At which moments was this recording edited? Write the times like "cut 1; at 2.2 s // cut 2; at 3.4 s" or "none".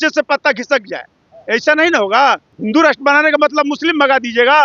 cut 1; at 2.5 s